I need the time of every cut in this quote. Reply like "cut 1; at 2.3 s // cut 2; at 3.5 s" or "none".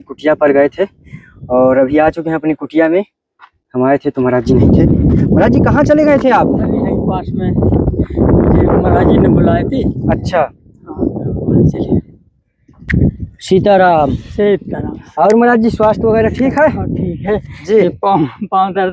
none